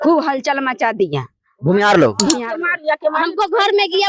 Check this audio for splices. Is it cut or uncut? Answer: cut